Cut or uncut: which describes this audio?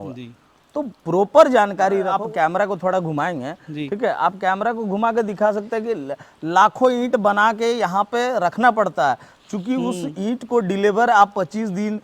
cut